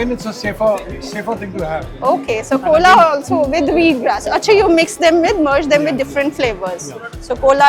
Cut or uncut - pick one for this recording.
uncut